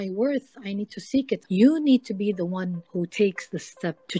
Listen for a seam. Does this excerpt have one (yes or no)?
yes